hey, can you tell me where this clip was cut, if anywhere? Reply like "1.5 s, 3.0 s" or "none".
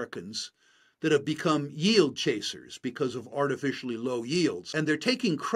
4.6 s